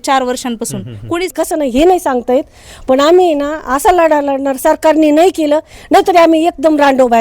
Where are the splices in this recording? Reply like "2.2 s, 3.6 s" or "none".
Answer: 1.3 s